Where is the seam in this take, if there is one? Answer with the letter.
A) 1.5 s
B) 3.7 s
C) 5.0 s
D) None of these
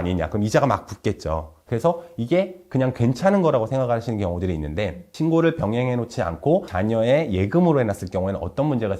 A